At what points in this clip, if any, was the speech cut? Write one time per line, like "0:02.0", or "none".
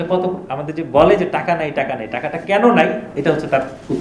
none